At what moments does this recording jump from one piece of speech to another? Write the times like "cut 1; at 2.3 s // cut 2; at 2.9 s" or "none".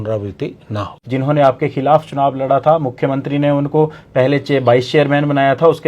cut 1; at 0.9 s